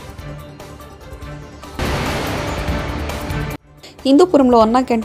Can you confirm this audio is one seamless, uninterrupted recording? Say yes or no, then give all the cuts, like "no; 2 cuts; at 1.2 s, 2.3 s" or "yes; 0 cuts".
yes; 0 cuts